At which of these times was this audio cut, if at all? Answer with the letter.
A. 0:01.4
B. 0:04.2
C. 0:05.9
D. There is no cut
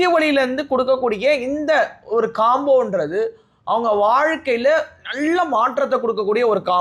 D